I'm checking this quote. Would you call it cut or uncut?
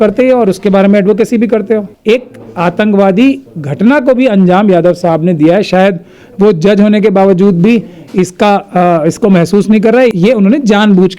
cut